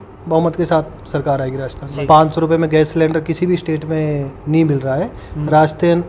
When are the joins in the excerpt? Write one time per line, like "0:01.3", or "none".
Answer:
0:01.8

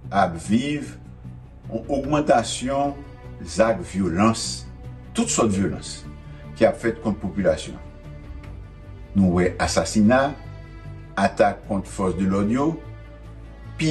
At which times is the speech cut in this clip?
0:07.8
0:09.1

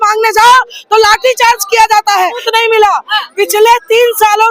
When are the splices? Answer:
0:02.5

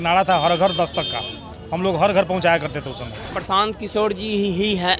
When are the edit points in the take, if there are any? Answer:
0:03.3

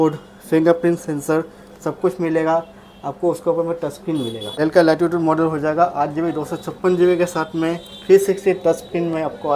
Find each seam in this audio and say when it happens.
0:04.5

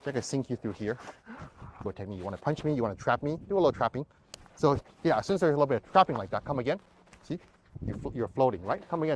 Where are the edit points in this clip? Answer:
0:01.9

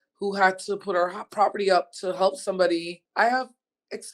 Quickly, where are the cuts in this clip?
0:03.0

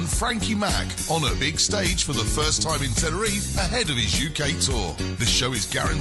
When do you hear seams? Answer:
none

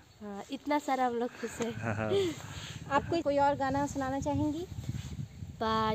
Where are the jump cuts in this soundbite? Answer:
0:03.2

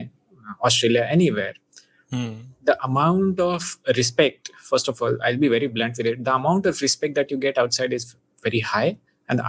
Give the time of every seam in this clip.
none

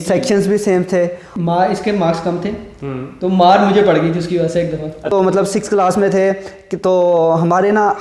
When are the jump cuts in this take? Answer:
0:01.2
0:05.1

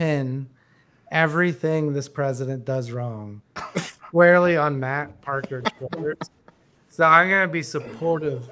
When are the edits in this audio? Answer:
none

